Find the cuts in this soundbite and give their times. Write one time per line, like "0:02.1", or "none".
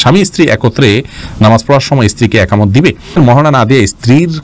0:03.2